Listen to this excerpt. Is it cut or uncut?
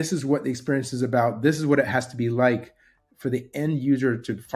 uncut